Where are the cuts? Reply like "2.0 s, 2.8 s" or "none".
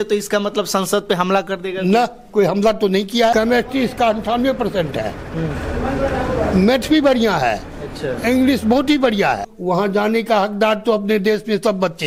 3.3 s, 9.5 s